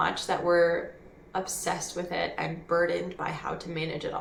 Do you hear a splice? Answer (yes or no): no